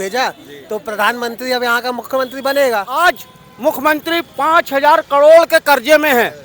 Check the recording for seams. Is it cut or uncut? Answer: cut